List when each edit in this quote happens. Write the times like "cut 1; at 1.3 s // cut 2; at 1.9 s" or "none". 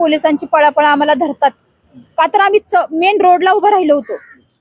none